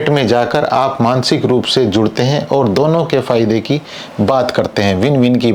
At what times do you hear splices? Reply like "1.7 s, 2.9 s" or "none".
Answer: none